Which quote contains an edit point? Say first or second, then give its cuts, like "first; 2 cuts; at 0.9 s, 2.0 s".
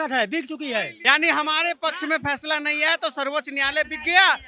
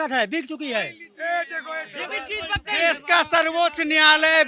first; 1 cut; at 0.9 s